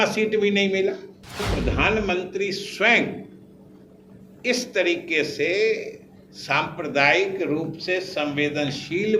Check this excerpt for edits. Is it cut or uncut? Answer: cut